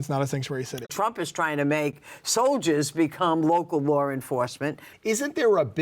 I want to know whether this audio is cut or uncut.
cut